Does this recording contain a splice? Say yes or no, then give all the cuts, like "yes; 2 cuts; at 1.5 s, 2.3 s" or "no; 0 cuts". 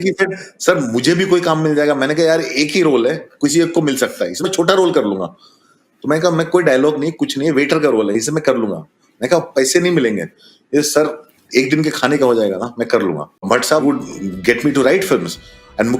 yes; 1 cut; at 13.8 s